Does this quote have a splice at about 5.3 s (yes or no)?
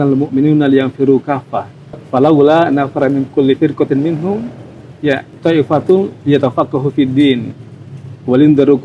yes